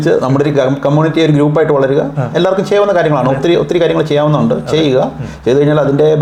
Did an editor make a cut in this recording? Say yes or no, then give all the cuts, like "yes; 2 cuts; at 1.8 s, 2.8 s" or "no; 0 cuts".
no; 0 cuts